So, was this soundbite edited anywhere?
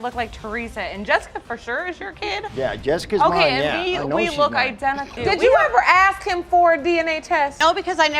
no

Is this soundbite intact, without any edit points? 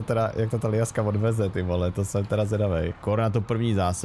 no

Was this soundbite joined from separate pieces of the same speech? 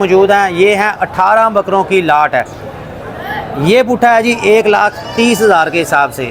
no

